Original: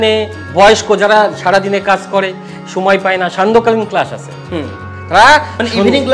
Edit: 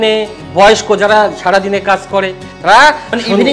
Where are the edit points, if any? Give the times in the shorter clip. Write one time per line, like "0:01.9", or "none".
0:02.4